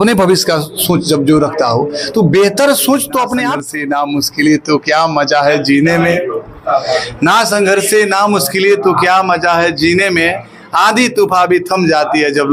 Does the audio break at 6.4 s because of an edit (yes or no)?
no